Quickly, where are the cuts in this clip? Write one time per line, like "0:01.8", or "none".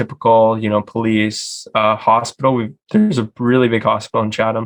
none

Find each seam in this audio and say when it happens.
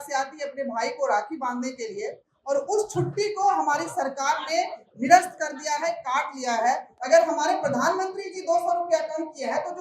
0:06.9

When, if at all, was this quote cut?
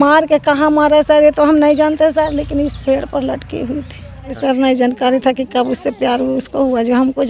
0:04.4

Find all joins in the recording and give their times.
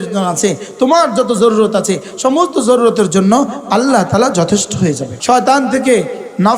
0:05.1

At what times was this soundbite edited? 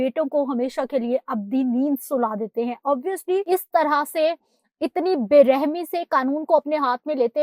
0:03.4

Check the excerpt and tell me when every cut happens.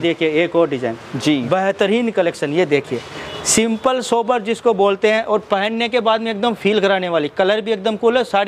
none

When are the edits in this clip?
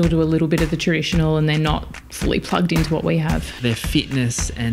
0:03.6

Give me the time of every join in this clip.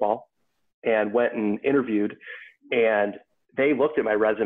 none

